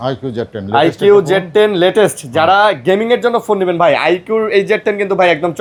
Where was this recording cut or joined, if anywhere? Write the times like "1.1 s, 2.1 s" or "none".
none